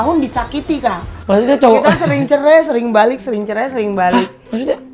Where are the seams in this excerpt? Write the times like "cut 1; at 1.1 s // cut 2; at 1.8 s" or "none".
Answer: cut 1; at 1.1 s